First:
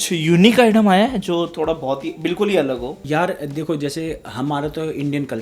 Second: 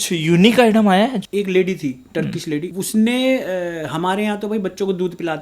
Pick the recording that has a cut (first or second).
second